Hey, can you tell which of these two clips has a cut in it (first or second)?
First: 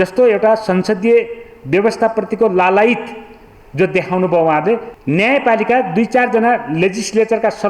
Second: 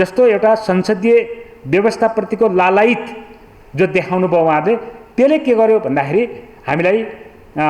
first